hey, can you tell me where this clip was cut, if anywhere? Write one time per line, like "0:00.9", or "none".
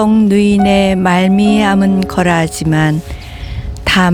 none